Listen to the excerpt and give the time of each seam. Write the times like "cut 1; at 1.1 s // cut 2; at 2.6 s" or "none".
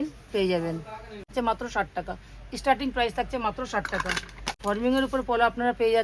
cut 1; at 1.3 s // cut 2; at 4.6 s